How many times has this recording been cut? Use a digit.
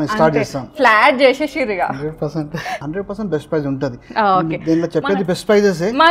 1